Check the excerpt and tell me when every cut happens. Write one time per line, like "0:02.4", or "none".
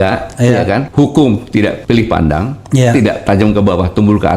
0:00.9
0:01.8